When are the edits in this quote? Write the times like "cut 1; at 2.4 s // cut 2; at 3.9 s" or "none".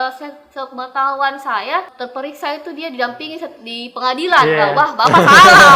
cut 1; at 2.0 s